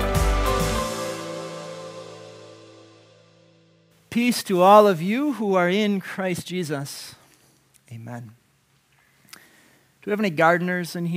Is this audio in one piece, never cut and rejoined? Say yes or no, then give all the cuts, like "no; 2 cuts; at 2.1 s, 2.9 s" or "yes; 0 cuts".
no; 1 cut; at 3.9 s